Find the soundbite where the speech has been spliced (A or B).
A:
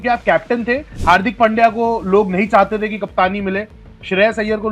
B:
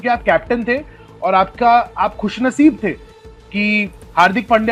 A